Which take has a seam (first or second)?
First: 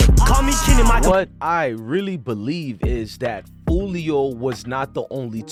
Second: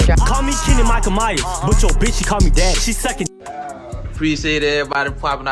second